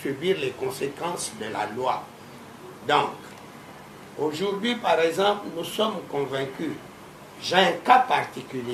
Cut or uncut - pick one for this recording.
uncut